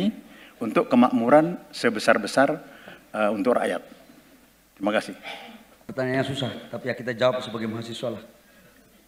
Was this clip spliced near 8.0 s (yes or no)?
no